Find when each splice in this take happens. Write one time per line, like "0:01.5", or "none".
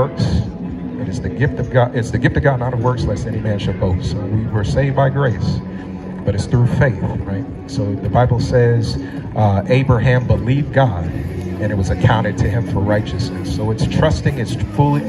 none